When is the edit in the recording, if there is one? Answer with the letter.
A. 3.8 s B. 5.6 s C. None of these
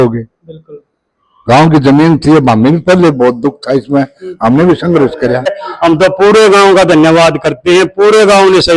B